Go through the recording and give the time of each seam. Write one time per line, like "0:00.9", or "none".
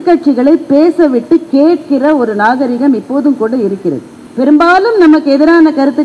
0:04.2